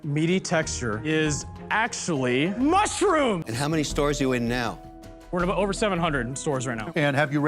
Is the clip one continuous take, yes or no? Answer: no